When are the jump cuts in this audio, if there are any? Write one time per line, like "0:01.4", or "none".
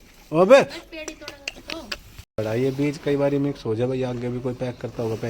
0:02.4